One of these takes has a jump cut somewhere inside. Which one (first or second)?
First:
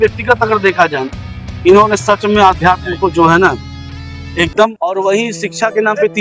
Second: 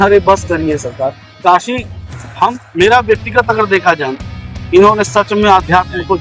first